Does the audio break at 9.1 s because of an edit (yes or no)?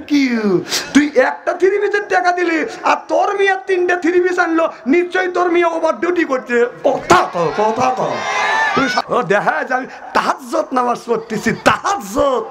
yes